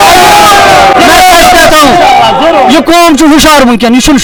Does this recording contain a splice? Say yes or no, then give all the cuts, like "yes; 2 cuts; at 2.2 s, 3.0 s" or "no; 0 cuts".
no; 0 cuts